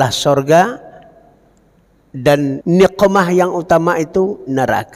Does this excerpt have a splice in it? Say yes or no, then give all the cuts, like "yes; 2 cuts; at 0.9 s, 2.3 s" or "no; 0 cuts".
yes; 1 cut; at 2.6 s